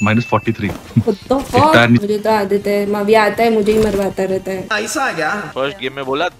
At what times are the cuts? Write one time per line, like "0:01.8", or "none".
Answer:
0:02.1
0:04.6
0:05.5